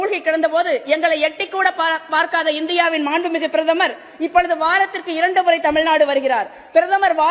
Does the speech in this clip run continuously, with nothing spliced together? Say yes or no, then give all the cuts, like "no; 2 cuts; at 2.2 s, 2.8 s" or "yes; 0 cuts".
yes; 0 cuts